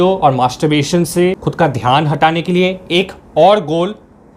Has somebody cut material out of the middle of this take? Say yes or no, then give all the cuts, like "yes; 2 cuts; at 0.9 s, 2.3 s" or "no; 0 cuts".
yes; 1 cut; at 1.4 s